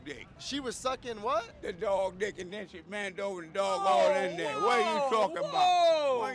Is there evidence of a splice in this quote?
no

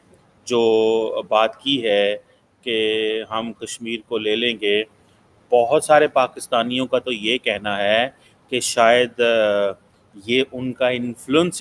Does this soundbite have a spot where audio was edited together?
no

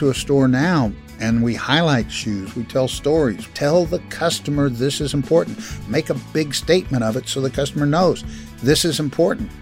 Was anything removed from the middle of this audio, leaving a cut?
yes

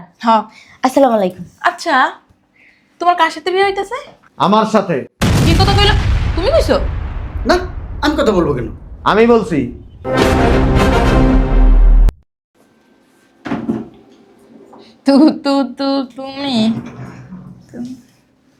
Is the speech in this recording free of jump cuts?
yes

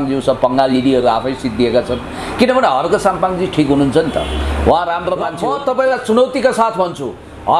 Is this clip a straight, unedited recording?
no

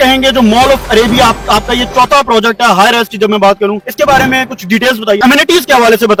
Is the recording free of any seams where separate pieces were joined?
yes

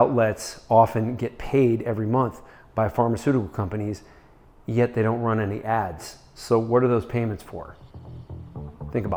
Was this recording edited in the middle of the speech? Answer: no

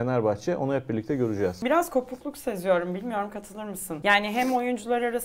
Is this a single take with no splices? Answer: no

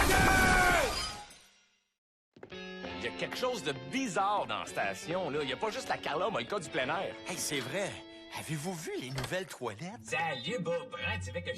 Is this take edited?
yes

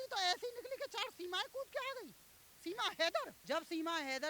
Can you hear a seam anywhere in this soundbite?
no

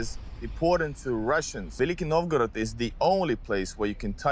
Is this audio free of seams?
no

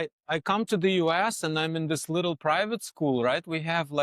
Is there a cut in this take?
no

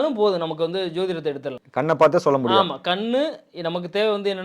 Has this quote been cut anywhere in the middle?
yes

